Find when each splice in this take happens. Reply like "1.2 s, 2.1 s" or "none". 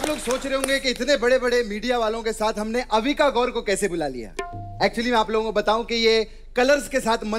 none